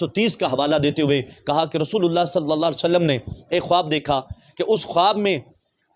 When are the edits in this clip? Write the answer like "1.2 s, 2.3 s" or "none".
none